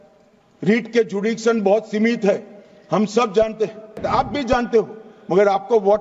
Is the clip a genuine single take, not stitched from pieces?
no; 1 cut; at 4.0 s

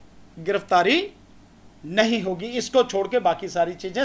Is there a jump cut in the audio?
no; 0 cuts

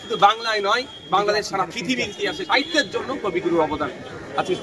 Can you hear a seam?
yes; 1 cut; at 2.6 s

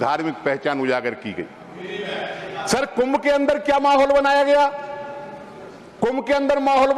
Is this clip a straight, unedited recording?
yes; 0 cuts

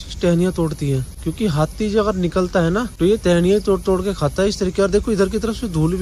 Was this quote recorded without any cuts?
no; 2 cuts; at 1.2 s, 2.9 s

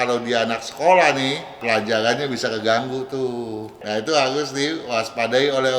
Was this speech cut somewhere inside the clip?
yes; 2 cuts; at 1.5 s, 3.7 s

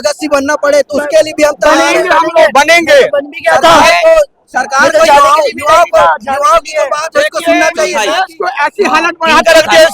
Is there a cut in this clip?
yes; 1 cut; at 8.0 s

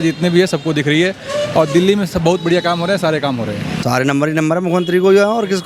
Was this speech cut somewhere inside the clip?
yes; 1 cut; at 3.7 s

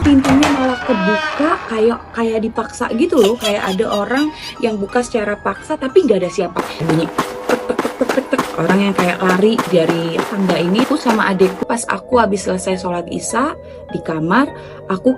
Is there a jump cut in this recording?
yes; 2 cuts; at 6.6 s, 11.6 s

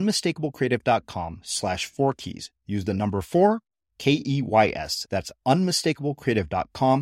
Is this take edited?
no; 0 cuts

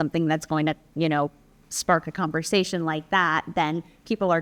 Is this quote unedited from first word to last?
yes; 0 cuts

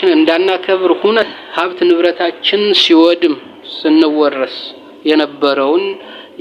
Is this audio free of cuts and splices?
no; 1 cut; at 1.2 s

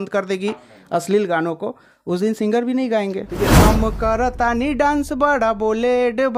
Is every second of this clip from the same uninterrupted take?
no; 1 cut; at 3.5 s

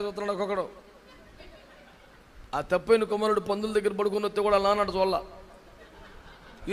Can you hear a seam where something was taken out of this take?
no; 0 cuts

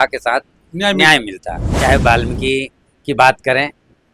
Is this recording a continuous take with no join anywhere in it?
no; 1 cut; at 1.8 s

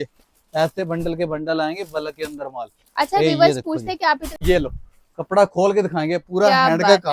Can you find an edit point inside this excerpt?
yes; 1 cut; at 4.3 s

